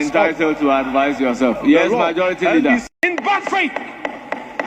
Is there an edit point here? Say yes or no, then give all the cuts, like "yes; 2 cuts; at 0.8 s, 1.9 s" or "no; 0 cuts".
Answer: yes; 1 cut; at 2.9 s